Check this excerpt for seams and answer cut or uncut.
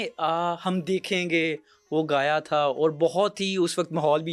uncut